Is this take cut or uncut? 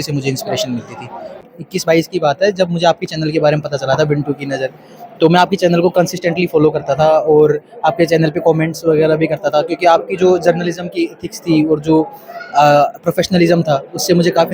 cut